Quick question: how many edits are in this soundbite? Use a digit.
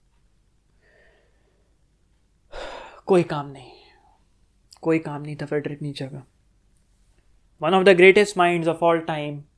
0